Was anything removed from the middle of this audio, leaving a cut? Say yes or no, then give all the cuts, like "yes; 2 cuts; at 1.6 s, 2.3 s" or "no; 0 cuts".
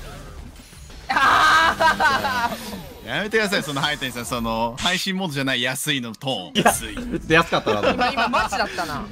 yes; 2 cuts; at 1.0 s, 6.5 s